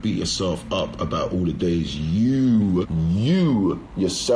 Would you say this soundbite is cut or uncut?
cut